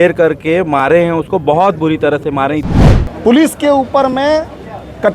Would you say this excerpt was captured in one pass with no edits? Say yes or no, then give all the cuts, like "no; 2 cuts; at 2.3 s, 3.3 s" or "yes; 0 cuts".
no; 1 cut; at 2.6 s